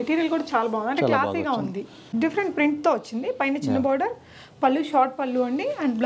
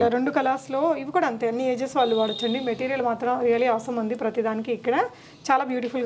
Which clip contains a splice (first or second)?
first